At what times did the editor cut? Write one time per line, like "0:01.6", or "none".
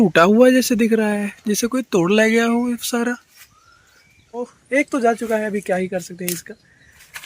0:04.6